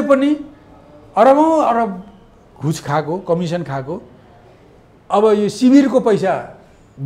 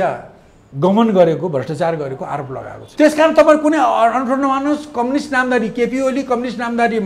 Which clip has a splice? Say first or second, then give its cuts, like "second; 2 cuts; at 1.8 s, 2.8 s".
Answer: second; 1 cut; at 2.8 s